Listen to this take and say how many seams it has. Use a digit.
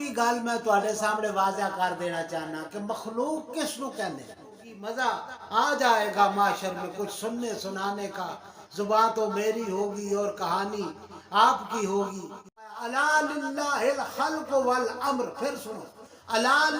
2